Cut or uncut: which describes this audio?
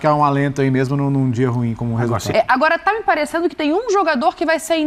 cut